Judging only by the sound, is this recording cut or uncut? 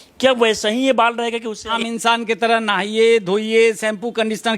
cut